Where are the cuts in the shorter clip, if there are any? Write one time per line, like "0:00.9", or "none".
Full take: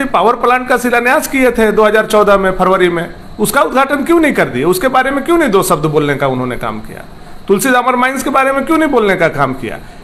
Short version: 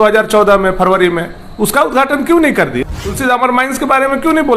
0:02.8